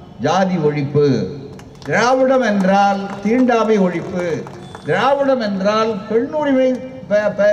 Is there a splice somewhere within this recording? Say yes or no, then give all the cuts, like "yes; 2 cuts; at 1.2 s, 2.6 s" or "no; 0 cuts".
no; 0 cuts